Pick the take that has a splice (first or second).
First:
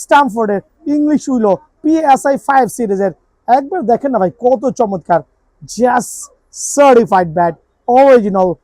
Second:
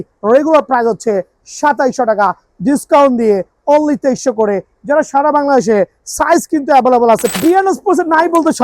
second